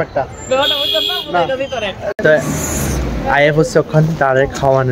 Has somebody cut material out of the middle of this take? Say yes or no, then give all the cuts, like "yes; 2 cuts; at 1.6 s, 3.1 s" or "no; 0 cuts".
yes; 1 cut; at 2.1 s